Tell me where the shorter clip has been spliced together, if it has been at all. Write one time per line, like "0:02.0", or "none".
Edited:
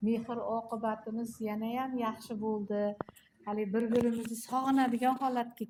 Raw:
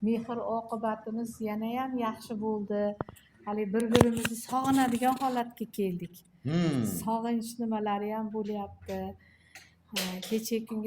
none